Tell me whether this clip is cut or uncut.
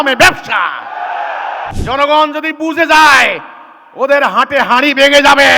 cut